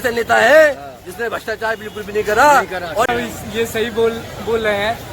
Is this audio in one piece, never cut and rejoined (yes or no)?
no